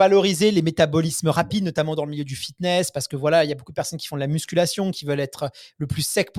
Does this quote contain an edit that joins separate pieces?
no; 0 cuts

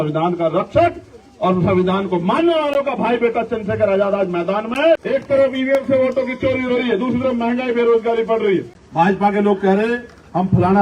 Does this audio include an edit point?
yes; 2 cuts; at 5.0 s, 8.8 s

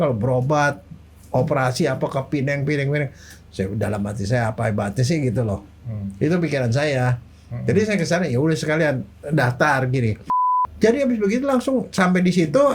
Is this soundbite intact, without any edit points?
no; 1 cut; at 10.6 s

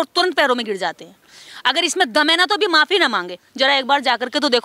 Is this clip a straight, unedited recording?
no; 1 cut; at 3.4 s

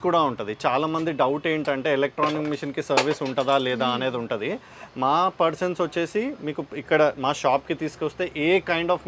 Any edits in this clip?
no; 0 cuts

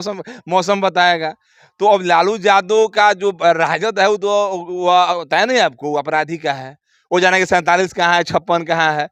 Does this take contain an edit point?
no; 0 cuts

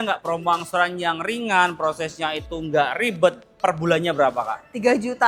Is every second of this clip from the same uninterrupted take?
yes; 0 cuts

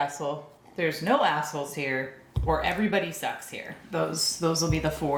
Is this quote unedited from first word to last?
yes; 0 cuts

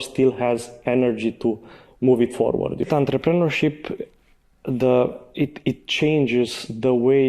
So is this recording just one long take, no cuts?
no; 1 cut; at 2.9 s

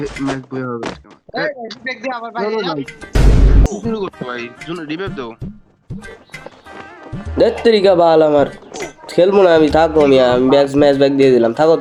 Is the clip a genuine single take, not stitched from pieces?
yes; 0 cuts

